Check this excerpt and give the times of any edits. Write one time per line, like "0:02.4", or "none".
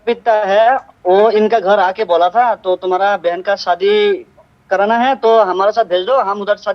0:00.9